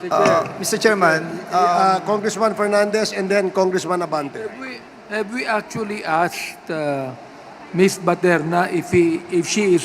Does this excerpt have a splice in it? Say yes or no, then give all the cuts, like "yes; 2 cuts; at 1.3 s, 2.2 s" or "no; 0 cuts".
no; 0 cuts